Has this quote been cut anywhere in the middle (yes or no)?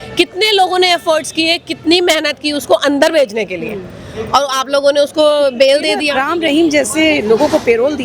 yes